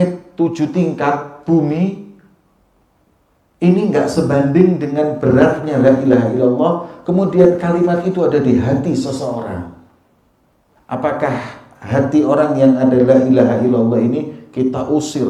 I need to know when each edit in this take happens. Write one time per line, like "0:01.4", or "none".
none